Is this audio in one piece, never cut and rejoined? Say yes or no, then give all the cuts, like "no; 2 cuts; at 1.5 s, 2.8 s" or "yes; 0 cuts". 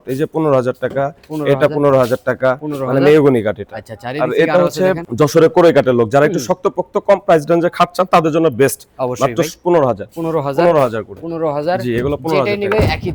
yes; 0 cuts